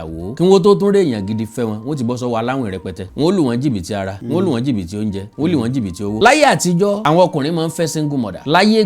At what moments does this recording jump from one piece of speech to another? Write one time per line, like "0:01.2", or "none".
0:03.0
0:06.2